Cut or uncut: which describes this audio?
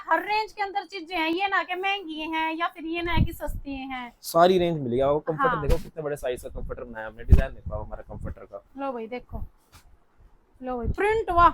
uncut